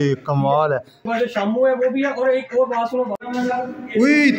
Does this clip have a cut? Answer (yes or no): yes